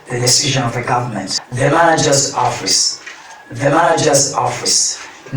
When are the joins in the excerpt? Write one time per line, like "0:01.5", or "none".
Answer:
0:01.4